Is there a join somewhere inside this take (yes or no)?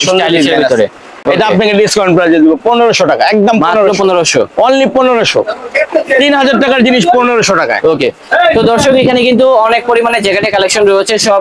no